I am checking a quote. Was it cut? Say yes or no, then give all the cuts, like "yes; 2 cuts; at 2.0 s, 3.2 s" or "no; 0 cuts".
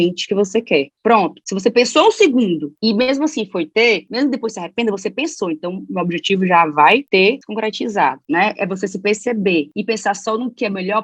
yes; 2 cuts; at 8.2 s, 9.7 s